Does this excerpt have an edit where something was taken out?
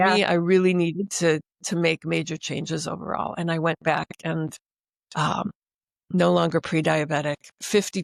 no; 0 cuts

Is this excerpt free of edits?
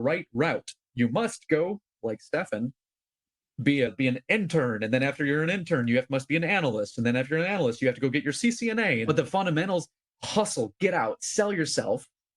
no; 1 cut; at 9.1 s

